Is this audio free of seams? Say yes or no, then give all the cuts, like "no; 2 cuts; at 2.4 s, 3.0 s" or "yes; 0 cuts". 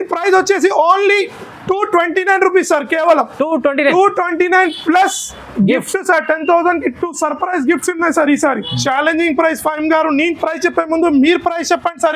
no; 1 cut; at 8.7 s